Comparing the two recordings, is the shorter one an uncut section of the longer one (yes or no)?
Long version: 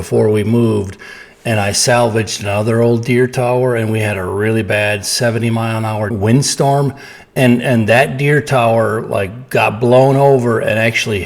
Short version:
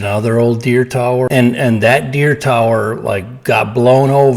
no